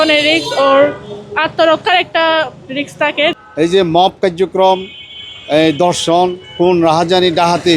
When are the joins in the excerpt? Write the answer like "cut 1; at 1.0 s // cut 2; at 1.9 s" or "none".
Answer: cut 1; at 3.3 s